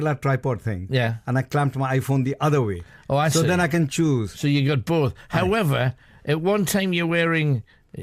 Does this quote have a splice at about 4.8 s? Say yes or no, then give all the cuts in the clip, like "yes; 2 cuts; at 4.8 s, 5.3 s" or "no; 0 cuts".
no; 1 cut; at 2.0 s